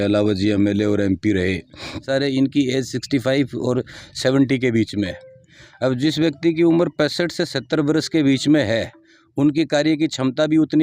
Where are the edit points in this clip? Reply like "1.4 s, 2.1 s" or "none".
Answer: 2.1 s